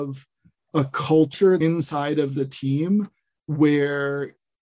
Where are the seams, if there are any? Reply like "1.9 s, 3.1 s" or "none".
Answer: 1.5 s